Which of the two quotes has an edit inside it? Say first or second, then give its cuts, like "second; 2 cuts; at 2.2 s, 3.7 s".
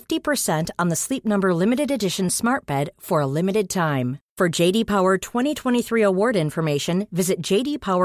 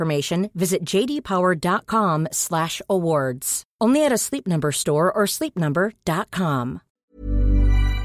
second; 1 cut; at 6.9 s